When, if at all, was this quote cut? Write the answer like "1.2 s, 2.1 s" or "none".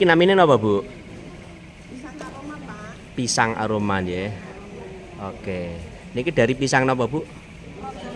none